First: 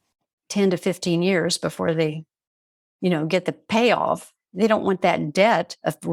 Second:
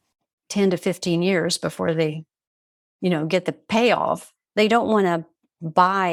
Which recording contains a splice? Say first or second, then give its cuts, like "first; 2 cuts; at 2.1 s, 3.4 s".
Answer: first; 1 cut; at 4.4 s